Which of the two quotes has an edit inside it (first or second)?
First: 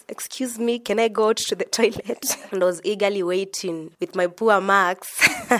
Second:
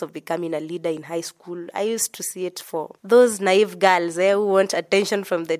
first